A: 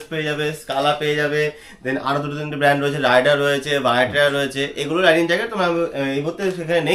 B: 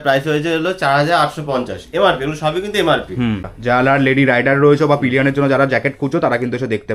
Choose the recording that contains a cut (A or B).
B